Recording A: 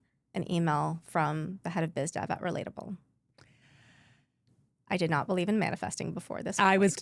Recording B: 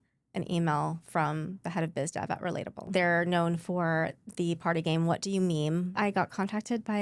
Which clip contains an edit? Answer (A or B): B